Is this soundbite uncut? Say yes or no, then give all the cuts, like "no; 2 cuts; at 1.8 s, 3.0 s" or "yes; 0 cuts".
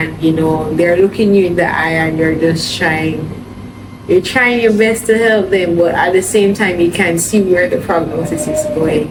yes; 0 cuts